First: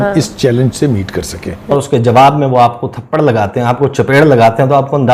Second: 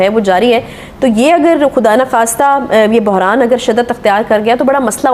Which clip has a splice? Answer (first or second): first